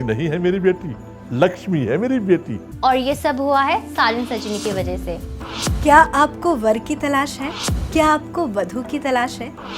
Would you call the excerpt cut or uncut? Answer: cut